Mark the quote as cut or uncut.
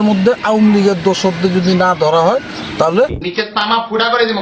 cut